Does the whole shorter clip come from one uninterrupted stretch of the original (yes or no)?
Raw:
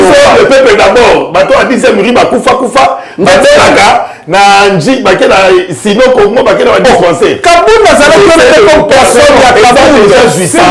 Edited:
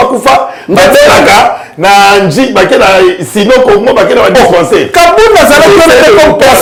yes